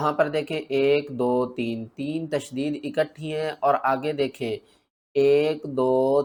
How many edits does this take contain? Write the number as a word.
zero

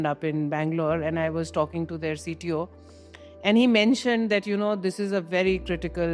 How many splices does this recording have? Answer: zero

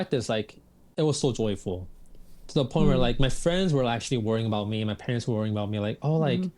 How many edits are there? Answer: zero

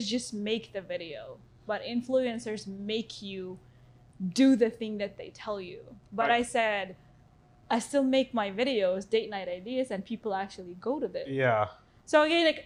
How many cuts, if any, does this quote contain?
zero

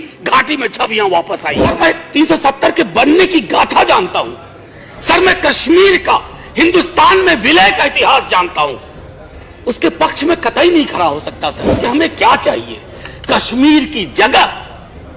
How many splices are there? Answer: three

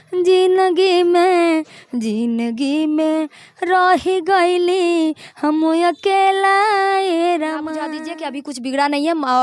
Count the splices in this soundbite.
one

